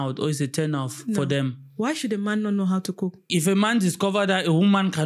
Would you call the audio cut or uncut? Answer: cut